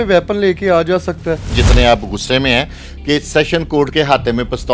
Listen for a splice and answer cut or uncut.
cut